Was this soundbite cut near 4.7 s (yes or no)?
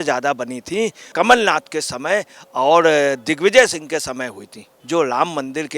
yes